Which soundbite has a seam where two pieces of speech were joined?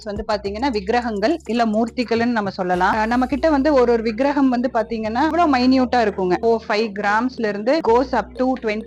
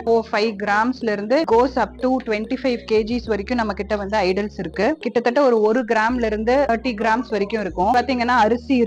second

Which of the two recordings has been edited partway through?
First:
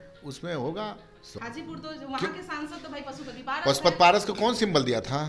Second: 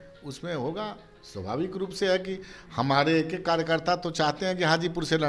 first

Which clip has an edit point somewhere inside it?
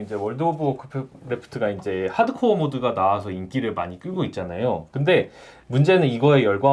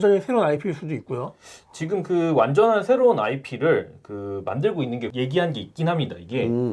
second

